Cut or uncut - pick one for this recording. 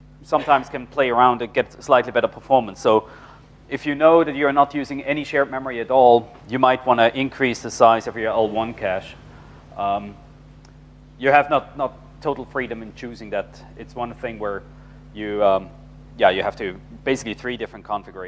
uncut